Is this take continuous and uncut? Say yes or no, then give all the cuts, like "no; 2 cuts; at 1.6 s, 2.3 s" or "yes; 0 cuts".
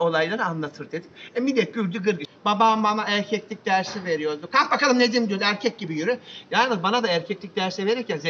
no; 1 cut; at 2.2 s